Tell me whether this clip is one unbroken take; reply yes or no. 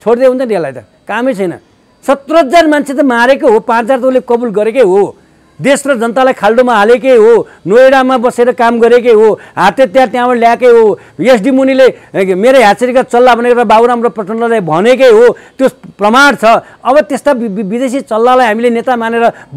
yes